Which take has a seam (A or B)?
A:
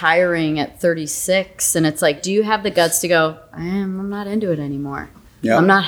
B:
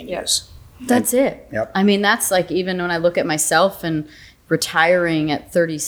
A